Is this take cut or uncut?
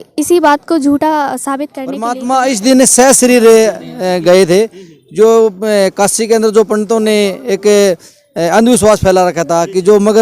cut